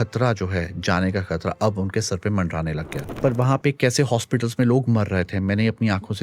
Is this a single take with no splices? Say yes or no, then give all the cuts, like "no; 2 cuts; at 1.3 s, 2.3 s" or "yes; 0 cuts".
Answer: no; 1 cut; at 3.1 s